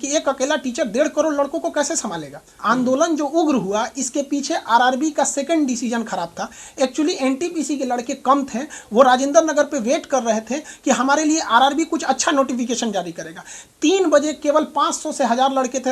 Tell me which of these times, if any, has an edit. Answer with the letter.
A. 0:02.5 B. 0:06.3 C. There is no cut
A